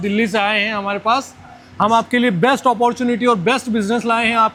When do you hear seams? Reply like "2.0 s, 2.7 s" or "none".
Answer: none